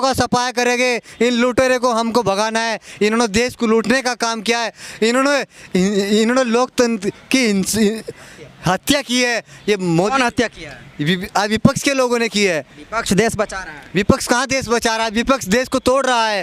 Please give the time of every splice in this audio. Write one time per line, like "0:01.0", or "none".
none